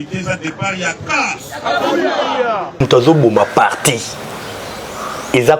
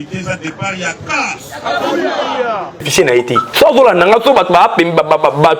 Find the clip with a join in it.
second; 1 cut; at 2.7 s

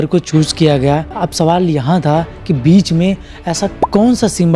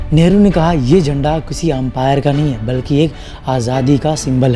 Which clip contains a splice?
first; 1 cut; at 1.1 s

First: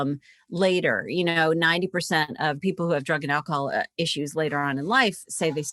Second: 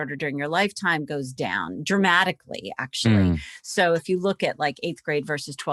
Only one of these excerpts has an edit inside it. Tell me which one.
first; 1 cut; at 2.6 s

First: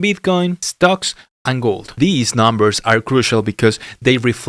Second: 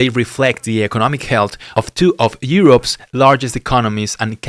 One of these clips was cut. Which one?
first; 1 cut; at 1.9 s

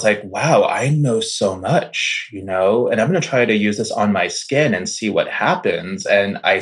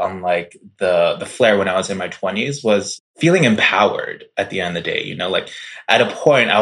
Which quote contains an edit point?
second; 1 cut; at 3.0 s

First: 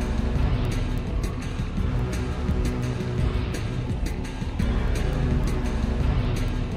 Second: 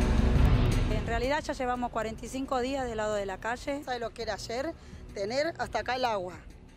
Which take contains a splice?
second; 2 cuts; at 1.0 s, 3.8 s

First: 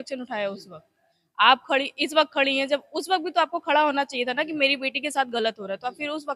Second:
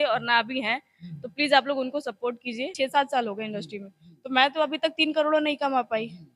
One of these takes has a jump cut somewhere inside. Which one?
second; 1 cut; at 2.7 s

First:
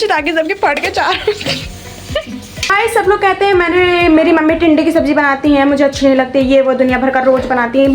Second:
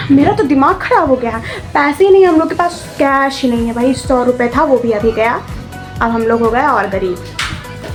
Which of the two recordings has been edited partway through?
first; 1 cut; at 2.6 s

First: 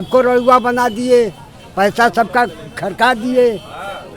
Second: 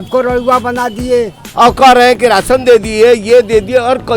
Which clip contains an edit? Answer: second; 1 cut; at 1.4 s

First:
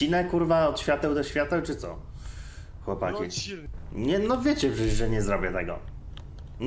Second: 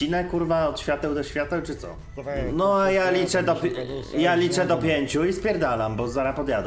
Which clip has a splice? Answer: second; 1 cut; at 2.1 s

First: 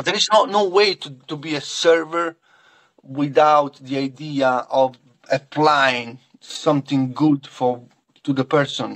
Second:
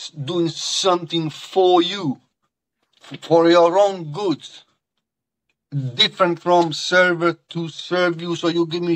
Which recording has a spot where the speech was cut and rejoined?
first; 1 cut; at 5.2 s

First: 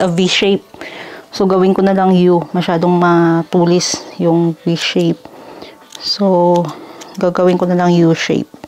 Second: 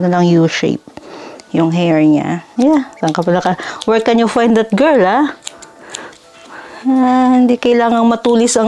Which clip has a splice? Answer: second; 1 cut; at 2.5 s

